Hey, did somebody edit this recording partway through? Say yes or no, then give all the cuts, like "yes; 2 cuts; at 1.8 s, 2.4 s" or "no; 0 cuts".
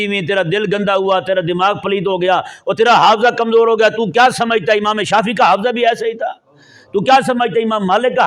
no; 0 cuts